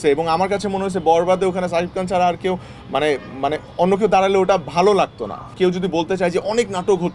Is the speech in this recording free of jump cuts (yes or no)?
no